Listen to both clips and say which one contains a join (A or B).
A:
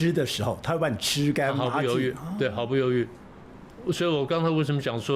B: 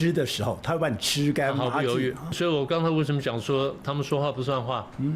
B